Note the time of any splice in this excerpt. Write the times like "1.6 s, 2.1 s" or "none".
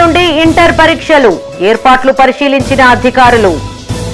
none